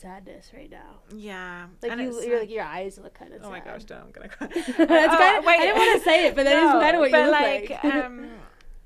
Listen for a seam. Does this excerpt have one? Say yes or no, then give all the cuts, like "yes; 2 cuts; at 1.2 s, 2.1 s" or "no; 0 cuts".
no; 0 cuts